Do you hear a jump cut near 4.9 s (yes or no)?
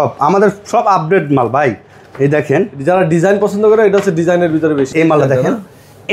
yes